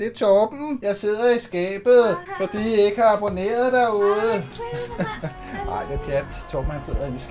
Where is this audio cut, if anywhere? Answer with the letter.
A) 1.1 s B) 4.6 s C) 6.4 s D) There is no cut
D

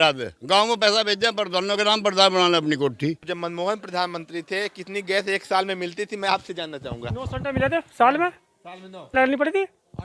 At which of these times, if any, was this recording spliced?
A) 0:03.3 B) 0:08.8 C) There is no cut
A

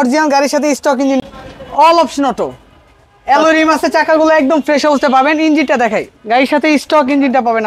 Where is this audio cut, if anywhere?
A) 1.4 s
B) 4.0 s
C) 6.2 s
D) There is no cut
A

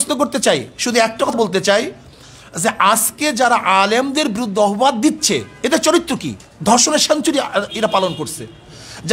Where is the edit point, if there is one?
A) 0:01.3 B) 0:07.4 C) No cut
A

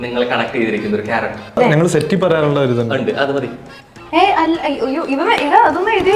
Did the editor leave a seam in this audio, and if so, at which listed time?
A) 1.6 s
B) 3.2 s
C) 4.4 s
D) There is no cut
A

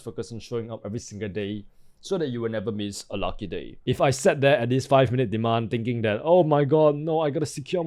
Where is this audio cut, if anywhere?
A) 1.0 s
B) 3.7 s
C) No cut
B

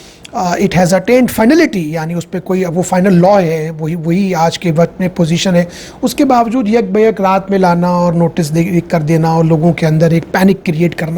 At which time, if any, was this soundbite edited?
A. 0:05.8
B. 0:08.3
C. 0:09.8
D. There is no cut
D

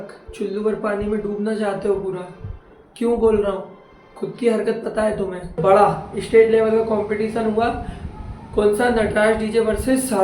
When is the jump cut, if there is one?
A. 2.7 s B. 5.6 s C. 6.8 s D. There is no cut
B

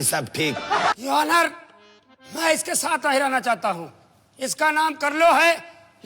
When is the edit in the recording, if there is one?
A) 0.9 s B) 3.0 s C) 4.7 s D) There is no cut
A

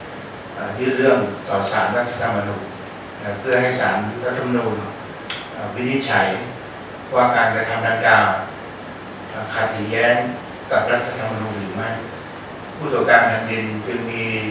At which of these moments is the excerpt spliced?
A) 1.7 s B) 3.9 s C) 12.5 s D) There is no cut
C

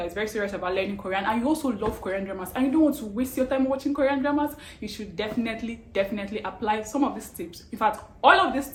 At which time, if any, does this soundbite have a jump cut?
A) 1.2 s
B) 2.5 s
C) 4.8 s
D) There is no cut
D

